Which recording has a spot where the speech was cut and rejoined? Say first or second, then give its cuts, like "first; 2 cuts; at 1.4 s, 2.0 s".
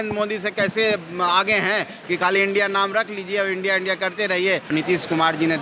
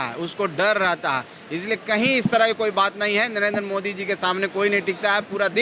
first; 2 cuts; at 1.9 s, 4.7 s